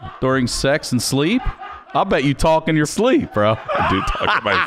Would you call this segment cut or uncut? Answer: cut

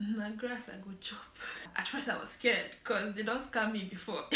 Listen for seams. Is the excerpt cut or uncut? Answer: cut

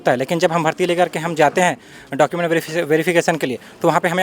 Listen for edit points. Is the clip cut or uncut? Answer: uncut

